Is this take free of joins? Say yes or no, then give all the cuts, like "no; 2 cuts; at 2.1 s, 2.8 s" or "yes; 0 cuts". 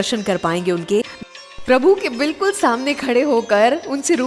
no; 1 cut; at 1.2 s